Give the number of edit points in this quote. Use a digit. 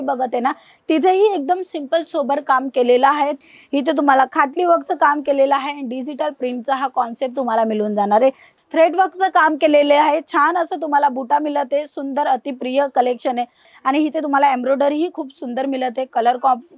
3